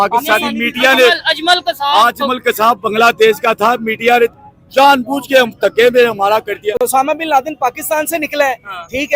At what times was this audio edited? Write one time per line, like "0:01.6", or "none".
0:06.8

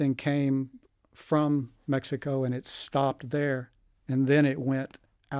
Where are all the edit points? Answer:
none

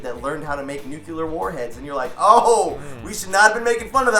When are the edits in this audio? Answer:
none

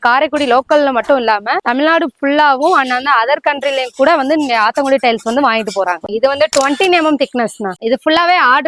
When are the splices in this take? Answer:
0:06.0
0:07.7

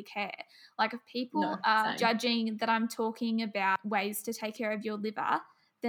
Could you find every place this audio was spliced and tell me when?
0:01.9
0:03.8

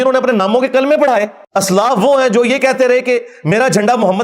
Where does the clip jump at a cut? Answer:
0:01.4

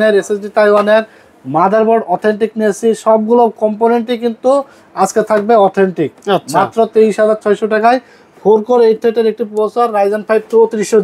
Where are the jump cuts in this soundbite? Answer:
none

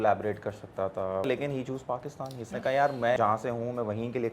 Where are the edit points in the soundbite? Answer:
0:01.3
0:03.2

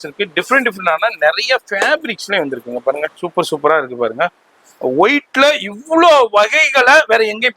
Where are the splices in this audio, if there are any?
0:03.2

